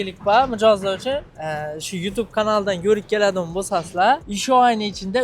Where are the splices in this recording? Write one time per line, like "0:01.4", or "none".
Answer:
0:01.4
0:04.3